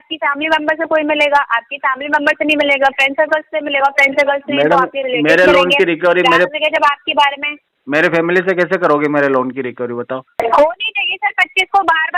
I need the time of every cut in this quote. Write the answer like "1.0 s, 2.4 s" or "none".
10.4 s

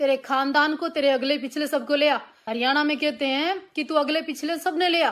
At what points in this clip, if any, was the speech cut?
2.4 s

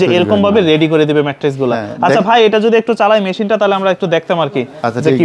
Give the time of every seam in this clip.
none

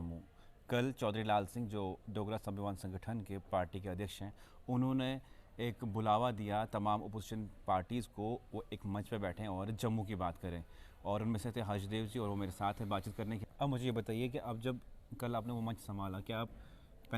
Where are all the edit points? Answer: 13.4 s

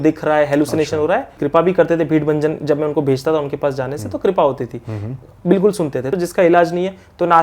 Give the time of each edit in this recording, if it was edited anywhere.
1.4 s, 6.1 s

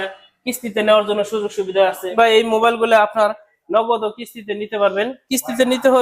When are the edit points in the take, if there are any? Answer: 2.0 s

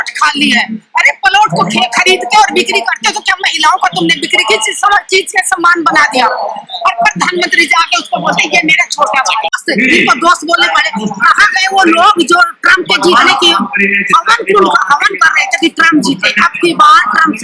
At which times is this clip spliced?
9.6 s

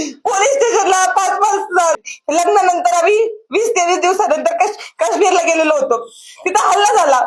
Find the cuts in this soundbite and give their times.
2.0 s

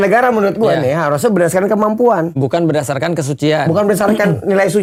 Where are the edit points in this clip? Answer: none

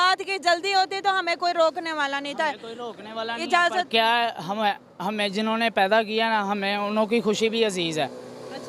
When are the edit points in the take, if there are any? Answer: none

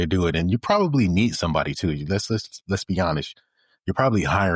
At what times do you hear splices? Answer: none

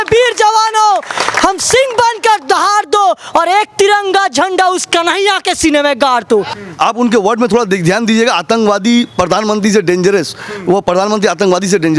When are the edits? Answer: 6.6 s

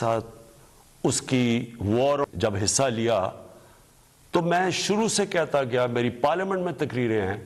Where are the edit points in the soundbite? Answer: 2.3 s

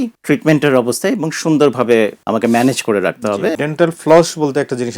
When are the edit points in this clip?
2.2 s, 3.6 s

